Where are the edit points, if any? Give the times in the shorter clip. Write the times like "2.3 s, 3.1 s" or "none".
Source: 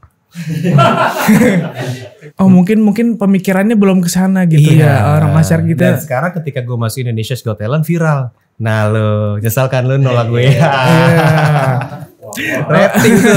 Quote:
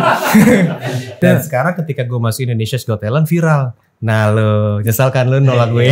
1.1 s